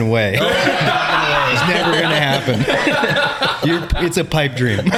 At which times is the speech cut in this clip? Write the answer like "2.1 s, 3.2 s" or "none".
none